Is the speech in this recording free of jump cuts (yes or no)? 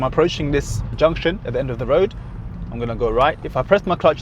no